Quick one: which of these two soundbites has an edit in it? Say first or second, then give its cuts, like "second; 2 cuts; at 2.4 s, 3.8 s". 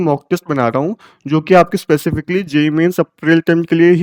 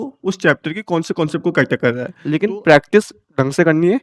second; 1 cut; at 2.1 s